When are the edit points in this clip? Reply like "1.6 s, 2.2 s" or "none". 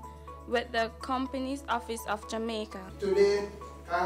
2.8 s